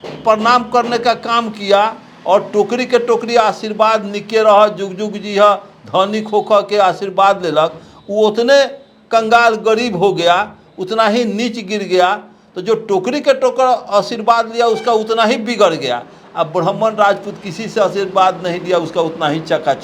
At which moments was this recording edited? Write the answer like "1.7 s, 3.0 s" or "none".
none